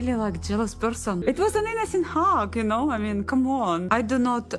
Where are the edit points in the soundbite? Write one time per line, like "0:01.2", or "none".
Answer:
0:01.2
0:03.8